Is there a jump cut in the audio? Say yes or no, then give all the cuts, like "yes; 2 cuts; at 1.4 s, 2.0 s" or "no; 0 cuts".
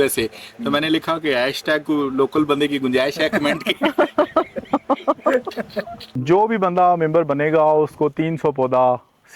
yes; 1 cut; at 6.0 s